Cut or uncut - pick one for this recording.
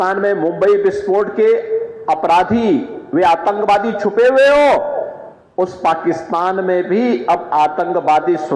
uncut